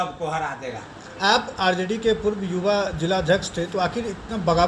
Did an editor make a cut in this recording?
no; 0 cuts

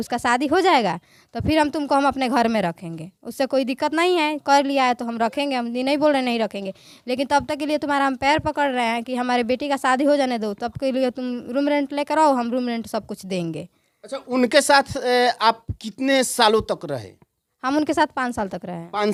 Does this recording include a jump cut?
no; 0 cuts

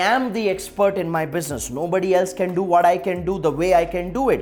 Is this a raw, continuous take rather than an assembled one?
yes; 0 cuts

